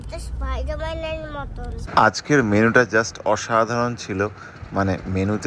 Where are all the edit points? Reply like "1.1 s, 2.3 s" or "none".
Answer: 1.8 s